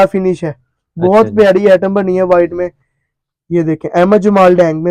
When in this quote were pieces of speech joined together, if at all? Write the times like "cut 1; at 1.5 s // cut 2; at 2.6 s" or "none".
none